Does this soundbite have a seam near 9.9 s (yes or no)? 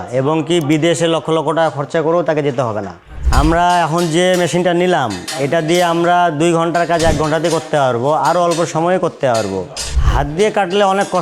yes